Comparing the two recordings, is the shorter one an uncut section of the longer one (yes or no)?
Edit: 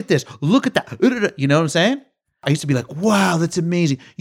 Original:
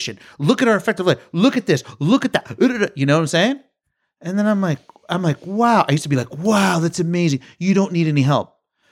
no